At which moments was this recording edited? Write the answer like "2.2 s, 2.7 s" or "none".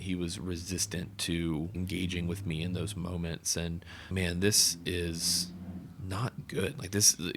1.7 s